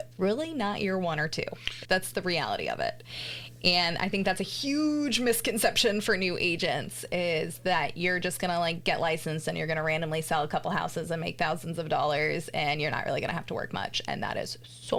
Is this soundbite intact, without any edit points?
yes; 0 cuts

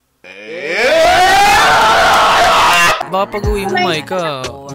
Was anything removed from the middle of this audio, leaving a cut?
yes; 1 cut; at 3.0 s

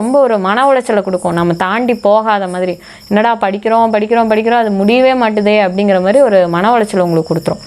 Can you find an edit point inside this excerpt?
no; 0 cuts

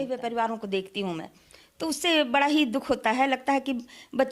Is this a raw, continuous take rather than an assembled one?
yes; 0 cuts

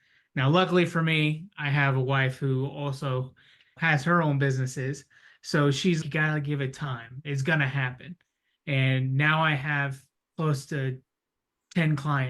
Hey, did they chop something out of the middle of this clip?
no; 0 cuts

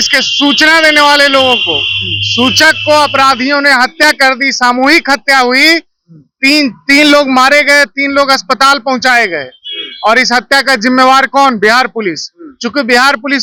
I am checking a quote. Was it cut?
no; 0 cuts

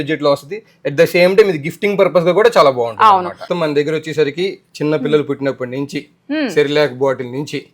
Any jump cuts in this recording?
yes; 1 cut; at 3.5 s

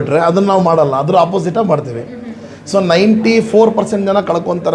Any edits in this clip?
no; 0 cuts

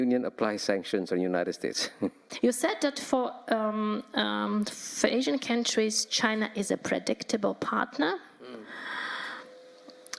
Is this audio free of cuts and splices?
no; 1 cut; at 2.2 s

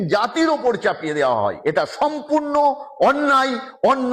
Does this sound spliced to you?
yes; 1 cut; at 1.6 s

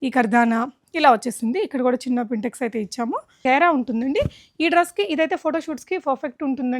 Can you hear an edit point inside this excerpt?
yes; 1 cut; at 3.3 s

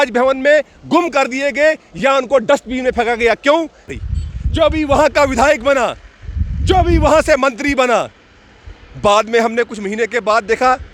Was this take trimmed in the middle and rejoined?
yes; 1 cut; at 3.9 s

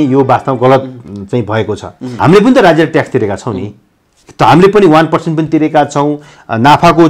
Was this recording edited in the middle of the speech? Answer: yes; 1 cut; at 2.2 s

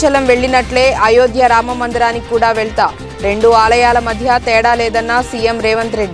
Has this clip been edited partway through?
no; 0 cuts

